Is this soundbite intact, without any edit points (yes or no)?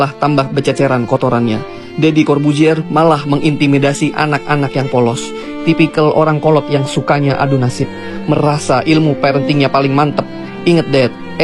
yes